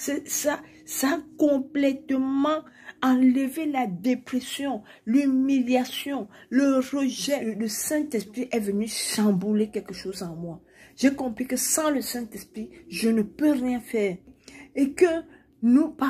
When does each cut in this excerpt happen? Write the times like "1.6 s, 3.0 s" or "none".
7.5 s